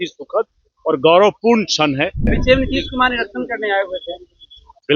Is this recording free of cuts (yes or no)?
no